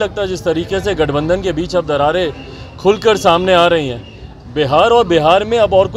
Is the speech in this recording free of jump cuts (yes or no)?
yes